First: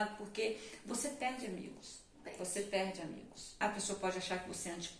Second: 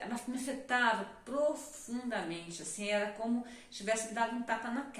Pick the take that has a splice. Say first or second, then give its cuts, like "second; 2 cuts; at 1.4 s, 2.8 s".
first; 1 cut; at 3.6 s